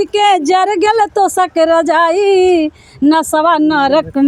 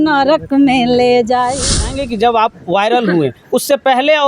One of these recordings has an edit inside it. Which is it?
second; 1 cut; at 1.7 s

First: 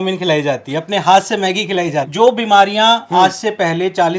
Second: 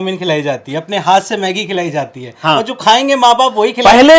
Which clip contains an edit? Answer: first; 1 cut; at 2.1 s

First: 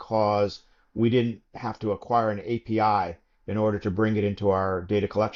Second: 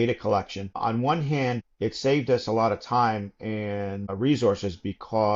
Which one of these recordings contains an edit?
second; 3 cuts; at 0.8 s, 1.7 s, 4.1 s

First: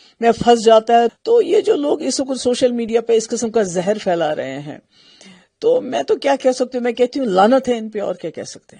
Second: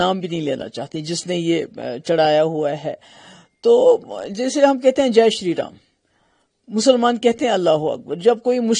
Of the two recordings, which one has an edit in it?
first; 1 cut; at 1.2 s

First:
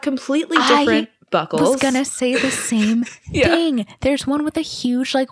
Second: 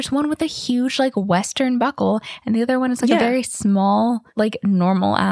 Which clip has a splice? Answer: second; 1 cut; at 4.3 s

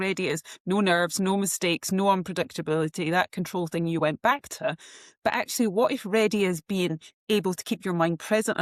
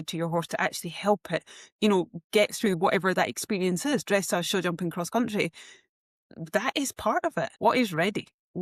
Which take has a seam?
second; 1 cut; at 7.5 s

